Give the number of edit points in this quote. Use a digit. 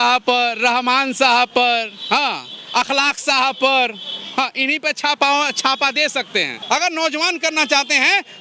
1